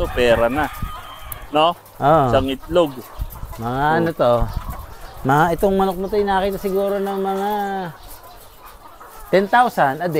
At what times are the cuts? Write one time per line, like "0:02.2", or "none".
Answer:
none